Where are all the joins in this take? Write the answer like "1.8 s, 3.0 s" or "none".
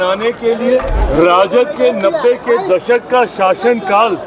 1.0 s